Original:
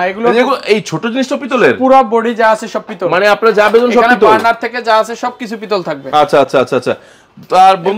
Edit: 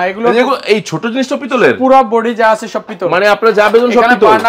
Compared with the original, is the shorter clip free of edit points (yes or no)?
yes